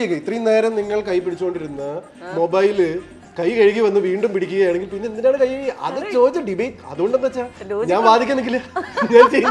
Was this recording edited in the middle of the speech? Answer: no; 0 cuts

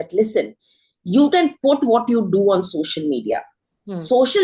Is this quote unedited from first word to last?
yes; 0 cuts

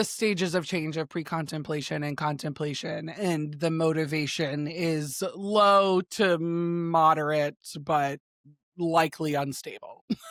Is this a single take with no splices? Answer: yes; 0 cuts

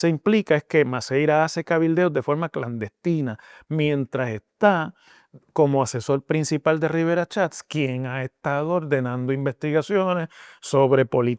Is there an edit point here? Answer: no; 0 cuts

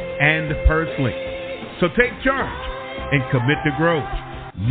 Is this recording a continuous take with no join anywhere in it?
yes; 0 cuts

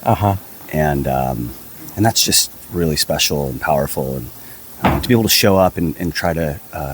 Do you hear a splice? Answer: no; 0 cuts

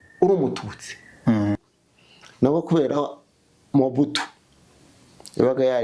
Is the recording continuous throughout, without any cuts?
no; 1 cut; at 1.6 s

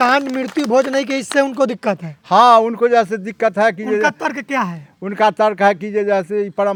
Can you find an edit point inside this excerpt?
no; 0 cuts

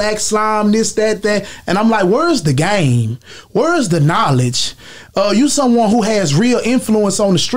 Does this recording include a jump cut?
no; 0 cuts

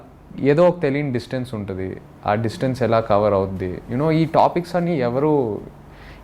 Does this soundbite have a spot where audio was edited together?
no; 0 cuts

